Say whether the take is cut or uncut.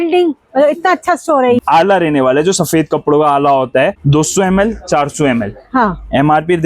cut